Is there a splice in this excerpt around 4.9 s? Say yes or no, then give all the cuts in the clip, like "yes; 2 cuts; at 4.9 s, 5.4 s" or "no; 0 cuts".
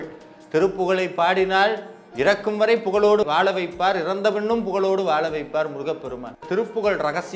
no; 1 cut; at 6.4 s